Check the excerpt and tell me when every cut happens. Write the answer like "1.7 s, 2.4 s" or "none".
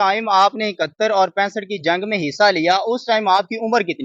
none